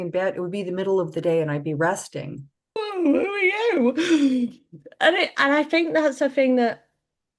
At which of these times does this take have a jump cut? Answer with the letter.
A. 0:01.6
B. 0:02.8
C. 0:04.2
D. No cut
B